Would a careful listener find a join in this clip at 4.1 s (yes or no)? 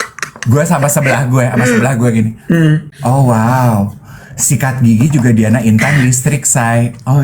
no